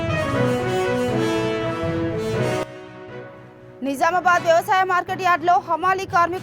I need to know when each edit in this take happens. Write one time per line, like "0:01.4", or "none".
none